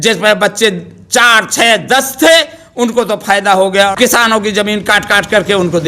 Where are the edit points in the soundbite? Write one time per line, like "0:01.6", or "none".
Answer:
0:03.9